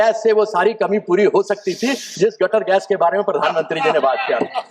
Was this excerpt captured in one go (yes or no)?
yes